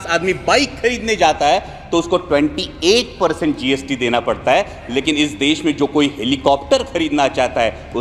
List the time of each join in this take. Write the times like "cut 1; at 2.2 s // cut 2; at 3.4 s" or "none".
none